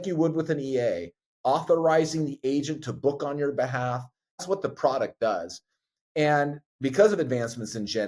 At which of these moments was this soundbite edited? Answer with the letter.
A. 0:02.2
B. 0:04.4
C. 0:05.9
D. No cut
B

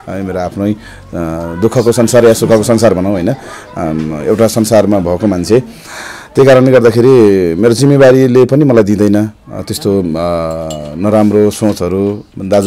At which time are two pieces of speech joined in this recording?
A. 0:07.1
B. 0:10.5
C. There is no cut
C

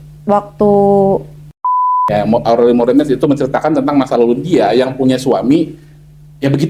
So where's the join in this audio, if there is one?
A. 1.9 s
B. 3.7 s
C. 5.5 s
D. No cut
A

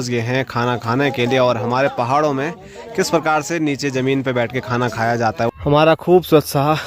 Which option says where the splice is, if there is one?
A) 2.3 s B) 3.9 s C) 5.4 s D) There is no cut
C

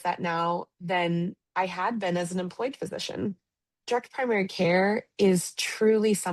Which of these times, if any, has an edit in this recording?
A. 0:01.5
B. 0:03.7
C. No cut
B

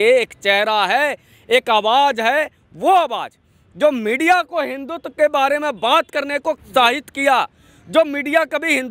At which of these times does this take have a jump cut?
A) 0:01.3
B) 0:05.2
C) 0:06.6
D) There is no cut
C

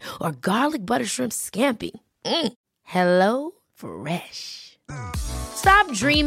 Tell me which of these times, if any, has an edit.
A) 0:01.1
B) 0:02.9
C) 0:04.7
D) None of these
D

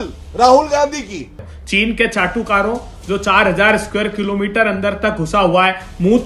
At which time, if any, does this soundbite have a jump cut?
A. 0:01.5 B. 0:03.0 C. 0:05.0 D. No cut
A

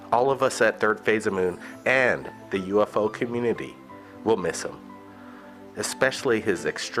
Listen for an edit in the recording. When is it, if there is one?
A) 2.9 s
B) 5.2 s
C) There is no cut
A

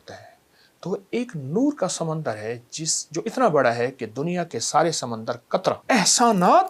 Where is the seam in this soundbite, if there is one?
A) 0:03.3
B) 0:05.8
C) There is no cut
B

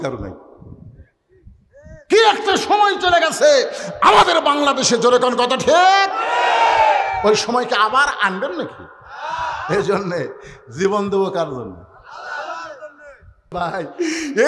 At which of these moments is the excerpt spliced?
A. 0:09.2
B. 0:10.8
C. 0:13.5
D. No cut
C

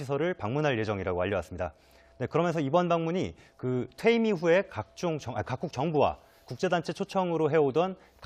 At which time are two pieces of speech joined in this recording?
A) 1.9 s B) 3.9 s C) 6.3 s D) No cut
A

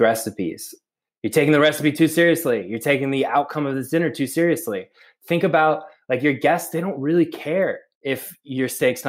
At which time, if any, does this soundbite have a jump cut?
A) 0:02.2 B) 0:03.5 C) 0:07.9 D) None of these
C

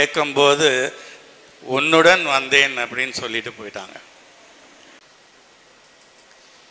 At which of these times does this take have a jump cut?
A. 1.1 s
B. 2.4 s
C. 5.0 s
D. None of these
C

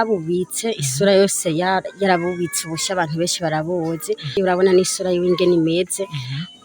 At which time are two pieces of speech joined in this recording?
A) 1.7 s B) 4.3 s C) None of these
B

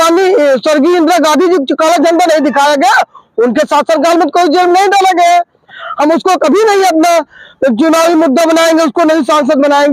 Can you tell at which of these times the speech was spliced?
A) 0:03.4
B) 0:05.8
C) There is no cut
B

